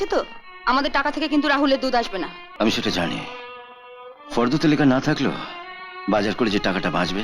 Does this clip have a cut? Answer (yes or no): yes